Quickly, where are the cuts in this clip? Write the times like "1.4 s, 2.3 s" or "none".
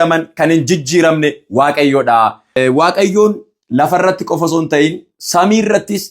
2.6 s